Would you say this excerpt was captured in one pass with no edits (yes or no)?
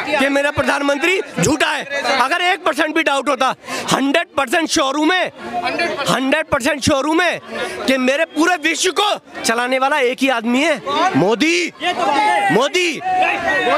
yes